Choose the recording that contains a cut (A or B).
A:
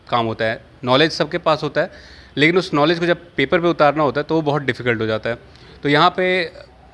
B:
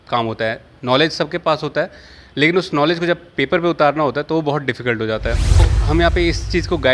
B